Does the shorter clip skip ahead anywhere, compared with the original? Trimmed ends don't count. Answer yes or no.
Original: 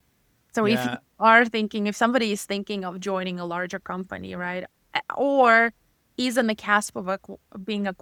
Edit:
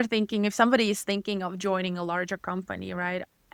no